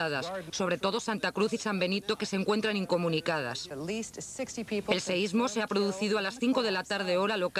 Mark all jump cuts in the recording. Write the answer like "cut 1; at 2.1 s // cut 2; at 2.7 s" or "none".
cut 1; at 4.8 s